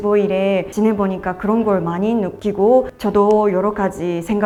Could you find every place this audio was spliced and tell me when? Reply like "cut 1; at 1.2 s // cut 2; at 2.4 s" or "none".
none